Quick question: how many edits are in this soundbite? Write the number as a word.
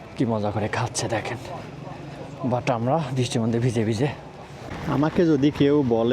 one